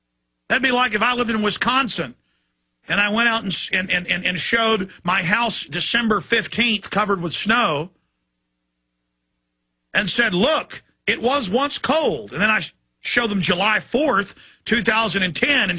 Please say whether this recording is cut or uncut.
cut